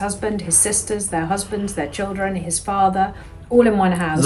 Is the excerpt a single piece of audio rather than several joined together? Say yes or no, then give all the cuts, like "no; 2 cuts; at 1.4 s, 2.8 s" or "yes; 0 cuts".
yes; 0 cuts